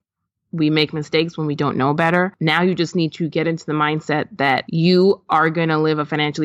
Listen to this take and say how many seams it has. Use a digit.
2